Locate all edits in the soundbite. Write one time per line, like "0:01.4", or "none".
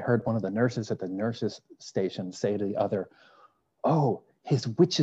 none